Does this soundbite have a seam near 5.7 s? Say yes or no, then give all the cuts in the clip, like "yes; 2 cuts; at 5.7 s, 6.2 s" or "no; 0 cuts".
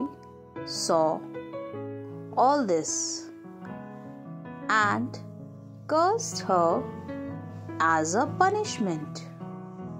no; 1 cut; at 9.1 s